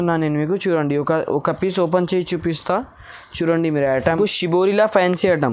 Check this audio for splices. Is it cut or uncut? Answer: cut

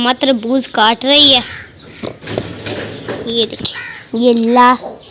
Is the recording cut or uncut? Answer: uncut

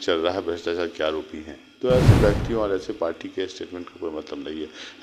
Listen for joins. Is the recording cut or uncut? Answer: uncut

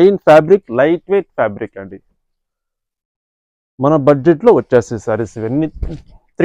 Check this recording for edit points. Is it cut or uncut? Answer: uncut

